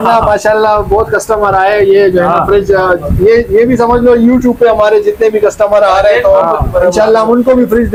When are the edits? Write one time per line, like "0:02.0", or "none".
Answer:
none